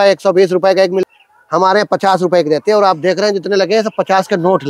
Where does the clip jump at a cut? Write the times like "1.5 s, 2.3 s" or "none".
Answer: 1.1 s